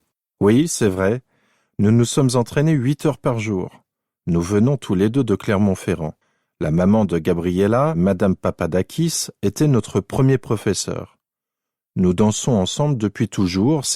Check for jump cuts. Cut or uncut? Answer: cut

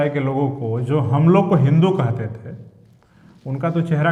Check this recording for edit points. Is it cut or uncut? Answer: uncut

